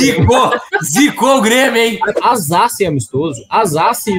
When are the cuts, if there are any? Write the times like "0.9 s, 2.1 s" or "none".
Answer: 2.1 s